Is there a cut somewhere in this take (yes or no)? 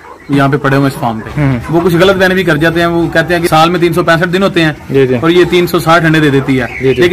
yes